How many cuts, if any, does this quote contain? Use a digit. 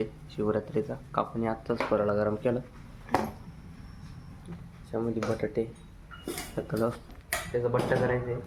0